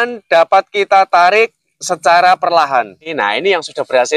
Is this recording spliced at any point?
yes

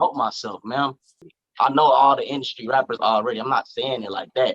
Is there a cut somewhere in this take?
yes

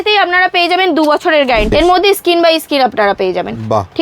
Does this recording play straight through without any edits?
no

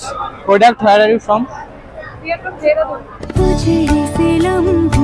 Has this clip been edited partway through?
no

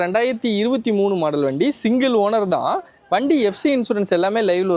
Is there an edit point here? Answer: no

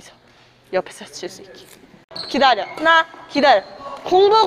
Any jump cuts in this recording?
yes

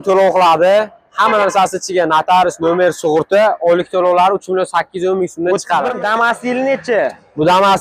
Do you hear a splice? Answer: yes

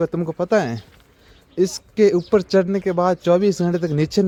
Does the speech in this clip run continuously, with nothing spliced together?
yes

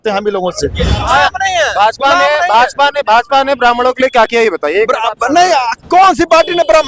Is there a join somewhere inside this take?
yes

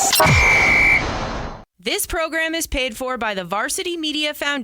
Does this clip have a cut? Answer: yes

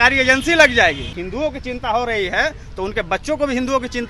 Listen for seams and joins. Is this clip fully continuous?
no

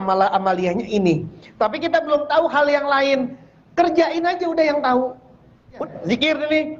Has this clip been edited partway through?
yes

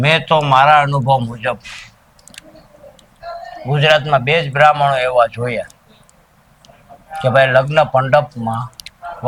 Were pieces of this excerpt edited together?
no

